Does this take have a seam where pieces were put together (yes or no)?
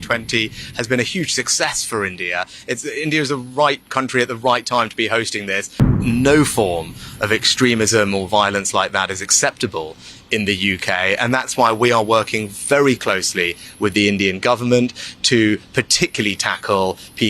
yes